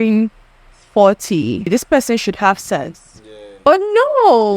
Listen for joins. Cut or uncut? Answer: cut